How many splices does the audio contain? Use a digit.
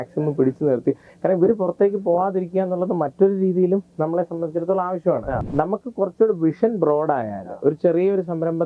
1